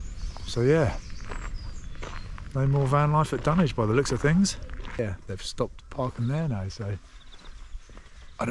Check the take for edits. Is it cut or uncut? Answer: cut